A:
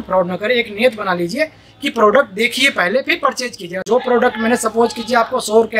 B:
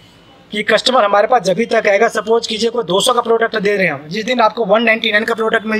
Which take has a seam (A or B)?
A